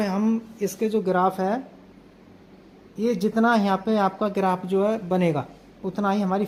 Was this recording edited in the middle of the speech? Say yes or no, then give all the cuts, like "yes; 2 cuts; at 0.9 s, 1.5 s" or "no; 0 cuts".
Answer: no; 0 cuts